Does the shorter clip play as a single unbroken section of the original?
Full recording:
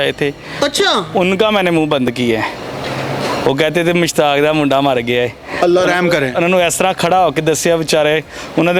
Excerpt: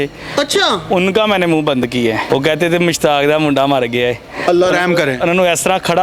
no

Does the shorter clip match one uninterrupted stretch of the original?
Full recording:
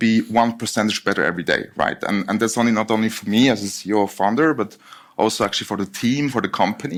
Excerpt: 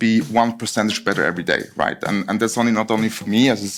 yes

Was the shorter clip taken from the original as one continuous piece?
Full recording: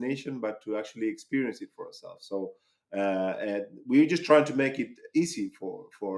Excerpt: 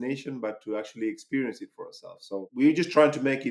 no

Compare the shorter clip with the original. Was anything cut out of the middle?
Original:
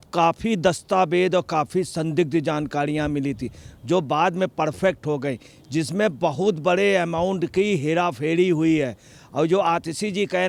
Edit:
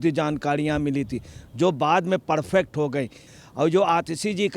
yes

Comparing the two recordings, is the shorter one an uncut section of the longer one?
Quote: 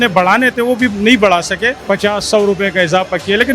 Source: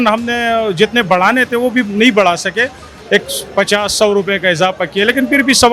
no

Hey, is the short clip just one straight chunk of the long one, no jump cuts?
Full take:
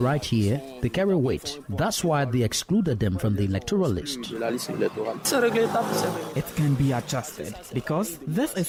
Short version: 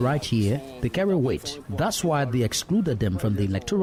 yes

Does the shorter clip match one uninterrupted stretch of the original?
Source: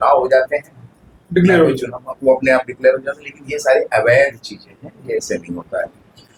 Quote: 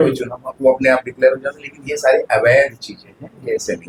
yes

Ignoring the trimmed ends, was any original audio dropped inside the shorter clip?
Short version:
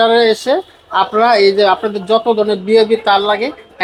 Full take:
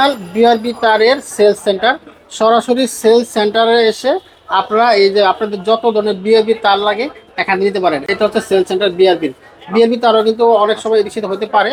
no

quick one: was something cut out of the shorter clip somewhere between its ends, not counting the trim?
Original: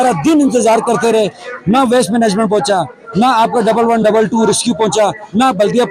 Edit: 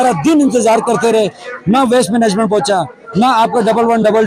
no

